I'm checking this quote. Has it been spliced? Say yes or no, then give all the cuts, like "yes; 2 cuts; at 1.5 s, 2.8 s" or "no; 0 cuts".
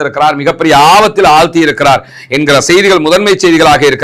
no; 0 cuts